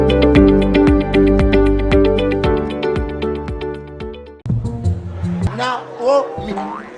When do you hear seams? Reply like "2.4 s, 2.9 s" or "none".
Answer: 4.3 s